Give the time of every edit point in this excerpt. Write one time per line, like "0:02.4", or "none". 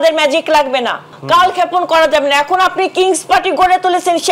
0:01.1